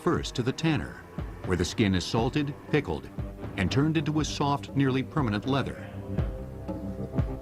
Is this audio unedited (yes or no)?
yes